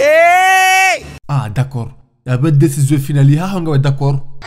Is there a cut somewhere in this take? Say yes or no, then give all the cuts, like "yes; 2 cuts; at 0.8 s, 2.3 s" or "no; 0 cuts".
yes; 1 cut; at 1.1 s